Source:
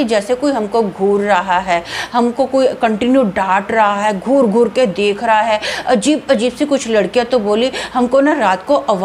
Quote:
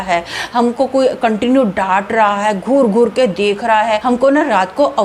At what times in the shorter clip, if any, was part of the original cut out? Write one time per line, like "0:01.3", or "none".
0:04.0